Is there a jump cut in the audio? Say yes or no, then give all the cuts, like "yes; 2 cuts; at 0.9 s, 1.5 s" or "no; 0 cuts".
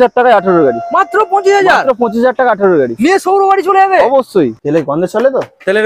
yes; 1 cut; at 4.6 s